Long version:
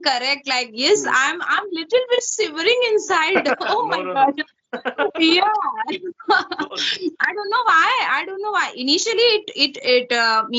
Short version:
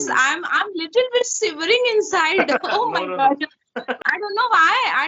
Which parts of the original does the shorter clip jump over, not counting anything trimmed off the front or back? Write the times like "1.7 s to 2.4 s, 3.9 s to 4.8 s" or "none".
5.0 s to 7.1 s